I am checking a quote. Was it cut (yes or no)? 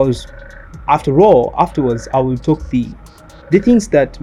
no